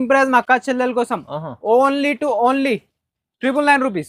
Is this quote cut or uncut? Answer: uncut